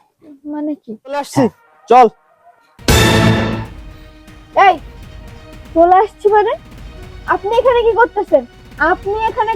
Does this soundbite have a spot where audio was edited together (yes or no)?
yes